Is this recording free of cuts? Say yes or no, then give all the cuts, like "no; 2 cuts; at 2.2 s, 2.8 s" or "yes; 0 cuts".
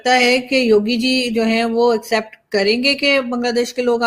yes; 0 cuts